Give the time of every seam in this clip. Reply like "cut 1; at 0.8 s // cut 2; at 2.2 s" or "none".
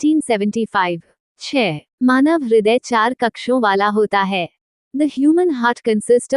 cut 1; at 1.5 s